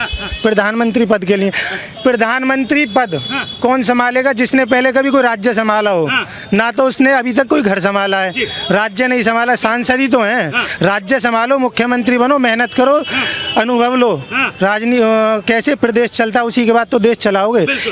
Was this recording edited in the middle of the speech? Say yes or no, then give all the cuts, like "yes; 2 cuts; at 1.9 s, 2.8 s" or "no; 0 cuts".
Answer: no; 0 cuts